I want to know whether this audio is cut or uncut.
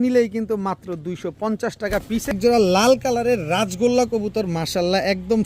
cut